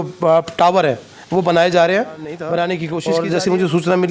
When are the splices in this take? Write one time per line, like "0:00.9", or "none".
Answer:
0:02.9